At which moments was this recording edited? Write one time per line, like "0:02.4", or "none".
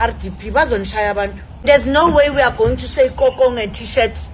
0:01.6

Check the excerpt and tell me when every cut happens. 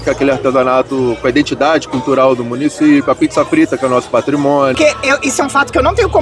0:04.7

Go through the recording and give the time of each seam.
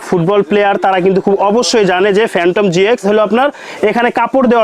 none

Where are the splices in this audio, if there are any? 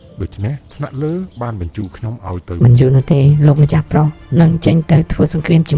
0:02.6

